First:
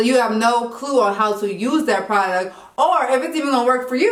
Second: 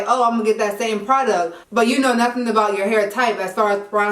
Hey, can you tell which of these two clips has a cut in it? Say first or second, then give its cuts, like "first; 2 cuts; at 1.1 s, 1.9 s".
second; 1 cut; at 1.6 s